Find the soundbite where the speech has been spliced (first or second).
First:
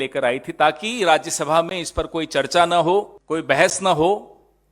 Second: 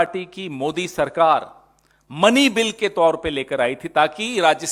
first